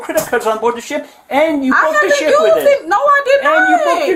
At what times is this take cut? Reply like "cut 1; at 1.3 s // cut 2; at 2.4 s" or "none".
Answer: none